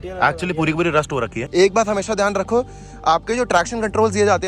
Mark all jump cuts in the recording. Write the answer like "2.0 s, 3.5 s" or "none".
1.4 s